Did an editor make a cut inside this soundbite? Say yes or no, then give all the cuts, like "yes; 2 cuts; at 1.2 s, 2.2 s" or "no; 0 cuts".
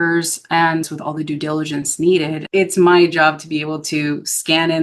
yes; 2 cuts; at 0.8 s, 2.4 s